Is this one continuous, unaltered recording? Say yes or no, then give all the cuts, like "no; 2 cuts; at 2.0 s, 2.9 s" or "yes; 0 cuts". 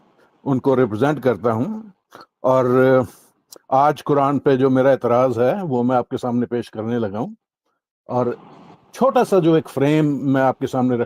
yes; 0 cuts